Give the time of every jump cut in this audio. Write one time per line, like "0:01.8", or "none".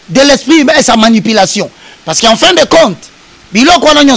none